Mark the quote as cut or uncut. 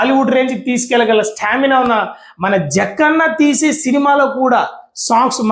uncut